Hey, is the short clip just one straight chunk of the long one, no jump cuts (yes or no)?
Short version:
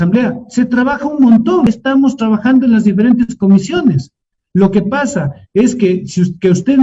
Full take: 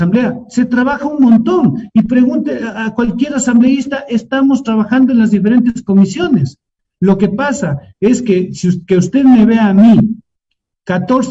no